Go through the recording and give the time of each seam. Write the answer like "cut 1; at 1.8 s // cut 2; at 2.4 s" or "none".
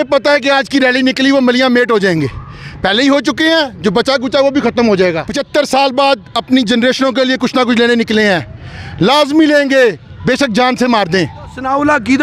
cut 1; at 5.3 s // cut 2; at 11.5 s